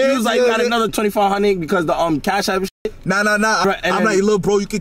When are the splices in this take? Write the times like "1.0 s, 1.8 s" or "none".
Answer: 0.9 s, 3.6 s